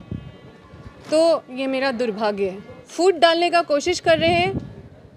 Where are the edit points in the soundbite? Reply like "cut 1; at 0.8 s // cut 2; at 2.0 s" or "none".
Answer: cut 1; at 2.8 s